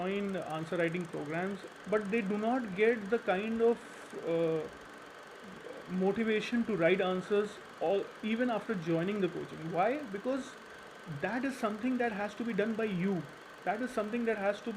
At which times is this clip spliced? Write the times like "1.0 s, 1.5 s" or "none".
1.6 s